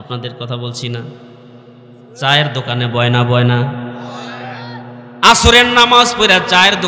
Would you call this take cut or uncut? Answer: uncut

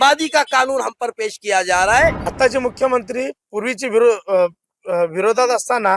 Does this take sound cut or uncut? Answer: cut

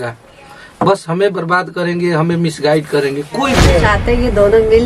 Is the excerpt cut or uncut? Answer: cut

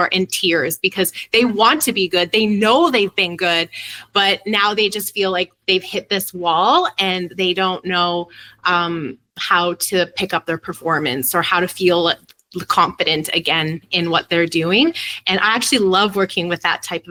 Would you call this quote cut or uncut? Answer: uncut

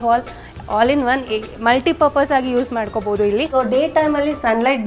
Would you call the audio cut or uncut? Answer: cut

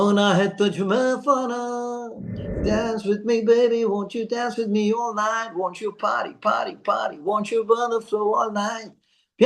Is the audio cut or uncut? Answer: cut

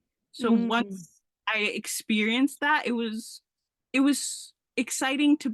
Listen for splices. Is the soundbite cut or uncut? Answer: uncut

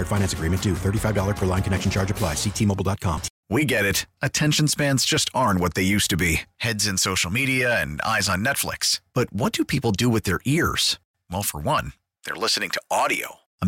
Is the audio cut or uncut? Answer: cut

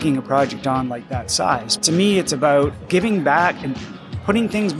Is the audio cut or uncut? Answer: cut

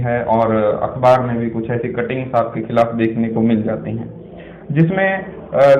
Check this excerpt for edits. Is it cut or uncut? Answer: uncut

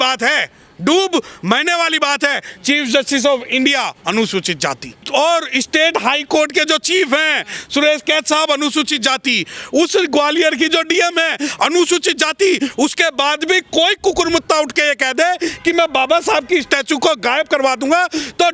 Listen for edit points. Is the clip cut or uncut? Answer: uncut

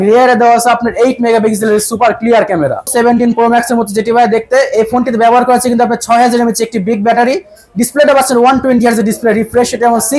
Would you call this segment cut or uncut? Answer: cut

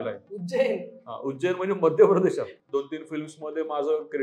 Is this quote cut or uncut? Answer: cut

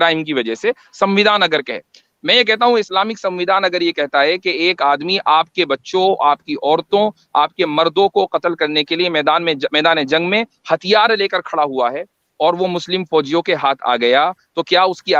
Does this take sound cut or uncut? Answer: uncut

